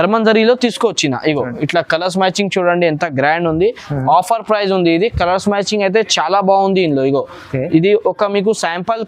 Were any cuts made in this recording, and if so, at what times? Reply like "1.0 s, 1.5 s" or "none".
none